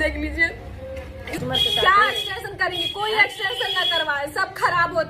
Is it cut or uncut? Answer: cut